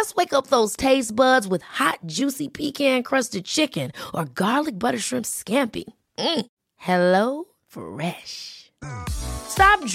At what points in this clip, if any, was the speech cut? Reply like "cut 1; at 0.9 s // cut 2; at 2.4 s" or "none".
none